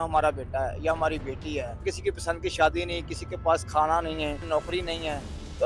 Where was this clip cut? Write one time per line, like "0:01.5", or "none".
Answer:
0:01.8
0:04.4